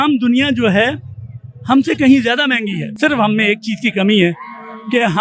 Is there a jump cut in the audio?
yes; 1 cut; at 2.9 s

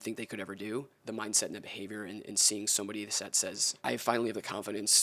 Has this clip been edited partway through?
yes; 2 cuts; at 1.0 s, 3.7 s

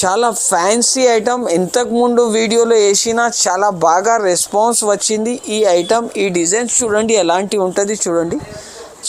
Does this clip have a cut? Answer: no; 0 cuts

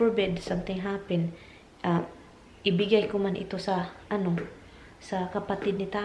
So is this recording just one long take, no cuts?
yes; 0 cuts

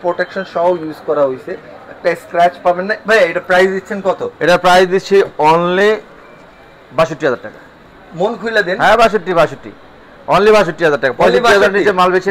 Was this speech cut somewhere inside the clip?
no; 0 cuts

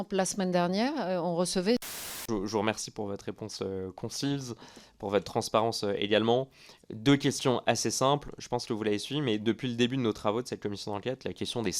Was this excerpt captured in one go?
no; 1 cut; at 2.3 s

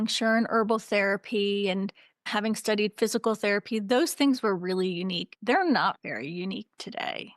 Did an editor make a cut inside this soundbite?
yes; 2 cuts; at 2.3 s, 5.3 s

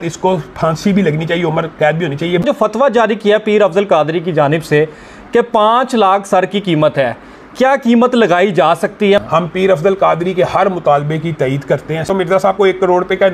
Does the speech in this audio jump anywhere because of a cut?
yes; 3 cuts; at 2.4 s, 9.2 s, 12.1 s

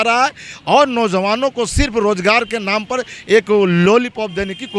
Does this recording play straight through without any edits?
yes; 0 cuts

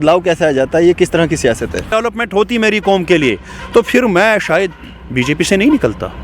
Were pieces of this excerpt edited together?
yes; 1 cut; at 1.9 s

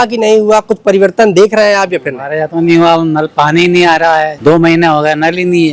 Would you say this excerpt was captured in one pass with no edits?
no; 1 cut; at 4.3 s

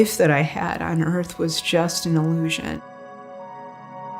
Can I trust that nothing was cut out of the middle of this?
no; 1 cut; at 2.9 s

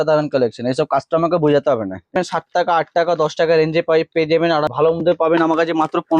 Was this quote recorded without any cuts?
no; 2 cuts; at 2.2 s, 4.7 s

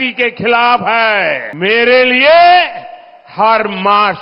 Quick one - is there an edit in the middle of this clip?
yes; 1 cut; at 1.5 s

